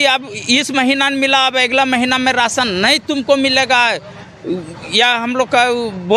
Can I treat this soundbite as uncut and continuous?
yes; 0 cuts

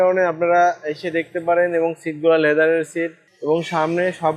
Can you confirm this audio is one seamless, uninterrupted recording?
no; 1 cut; at 3.3 s

